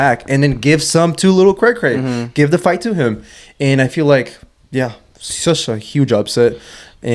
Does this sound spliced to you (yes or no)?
no